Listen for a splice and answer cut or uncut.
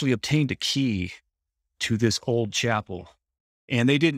uncut